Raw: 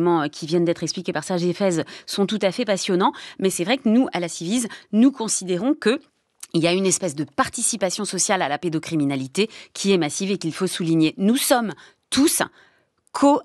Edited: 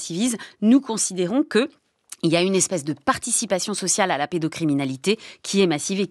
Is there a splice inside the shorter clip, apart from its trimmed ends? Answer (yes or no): no